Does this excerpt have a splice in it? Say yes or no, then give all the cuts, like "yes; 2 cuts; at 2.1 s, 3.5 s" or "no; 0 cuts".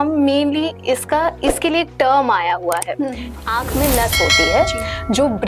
yes; 1 cut; at 3.3 s